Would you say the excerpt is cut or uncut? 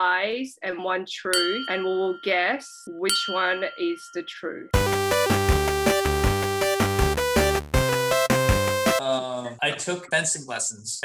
uncut